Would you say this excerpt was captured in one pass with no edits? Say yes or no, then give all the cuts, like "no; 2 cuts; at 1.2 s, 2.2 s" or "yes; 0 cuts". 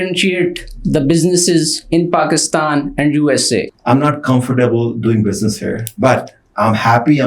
no; 1 cut; at 3.7 s